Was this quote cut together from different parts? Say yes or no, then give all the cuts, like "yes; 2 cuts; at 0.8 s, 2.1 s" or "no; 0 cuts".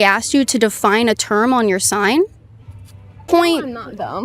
yes; 1 cut; at 3.2 s